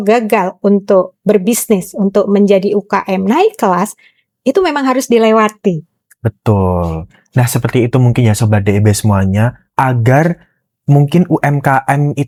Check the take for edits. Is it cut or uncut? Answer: uncut